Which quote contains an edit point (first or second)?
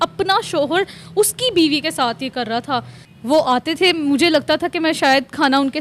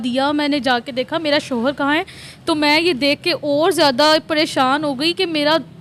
first